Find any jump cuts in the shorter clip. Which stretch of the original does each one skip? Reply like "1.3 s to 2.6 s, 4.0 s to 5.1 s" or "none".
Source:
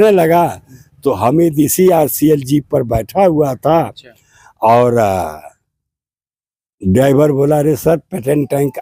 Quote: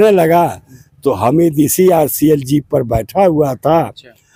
none